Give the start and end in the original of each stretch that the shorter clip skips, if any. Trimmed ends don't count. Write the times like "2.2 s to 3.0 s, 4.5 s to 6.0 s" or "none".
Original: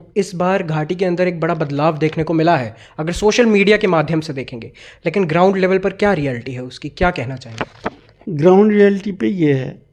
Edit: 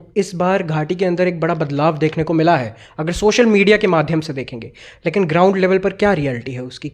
none